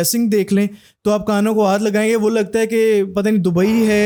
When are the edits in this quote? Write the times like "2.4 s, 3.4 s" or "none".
none